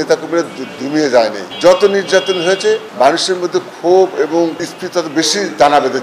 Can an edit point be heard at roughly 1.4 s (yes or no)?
yes